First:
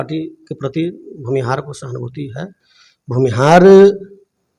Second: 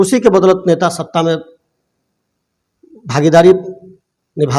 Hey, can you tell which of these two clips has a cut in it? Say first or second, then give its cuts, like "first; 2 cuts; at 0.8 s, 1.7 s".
first; 1 cut; at 2.6 s